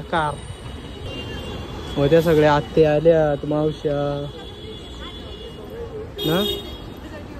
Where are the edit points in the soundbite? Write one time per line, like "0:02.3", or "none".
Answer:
0:01.1